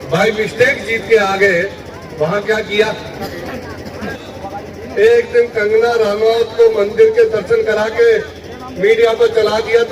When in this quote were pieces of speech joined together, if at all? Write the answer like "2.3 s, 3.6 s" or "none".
4.2 s